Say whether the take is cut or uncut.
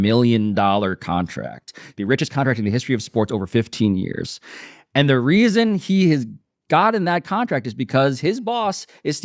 uncut